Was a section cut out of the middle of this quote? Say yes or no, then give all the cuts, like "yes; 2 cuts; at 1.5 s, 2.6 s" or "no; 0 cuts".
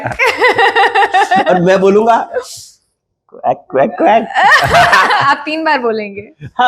no; 0 cuts